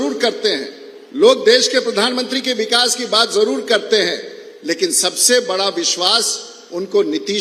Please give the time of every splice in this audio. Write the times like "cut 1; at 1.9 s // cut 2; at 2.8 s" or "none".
none